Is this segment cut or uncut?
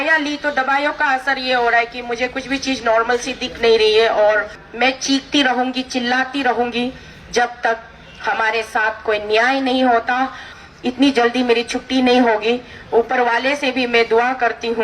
cut